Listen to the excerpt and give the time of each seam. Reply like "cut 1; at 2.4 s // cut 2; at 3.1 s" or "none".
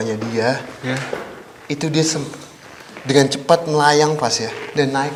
none